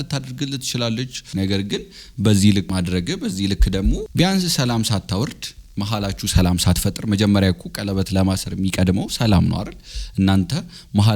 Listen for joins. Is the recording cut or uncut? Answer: cut